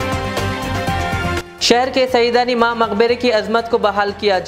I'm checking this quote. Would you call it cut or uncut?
cut